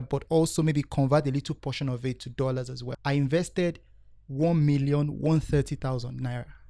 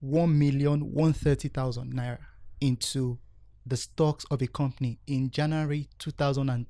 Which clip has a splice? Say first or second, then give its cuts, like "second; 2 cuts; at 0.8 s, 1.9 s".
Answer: first; 1 cut; at 2.8 s